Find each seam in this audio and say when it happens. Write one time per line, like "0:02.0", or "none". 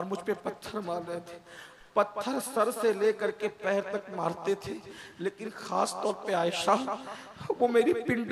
none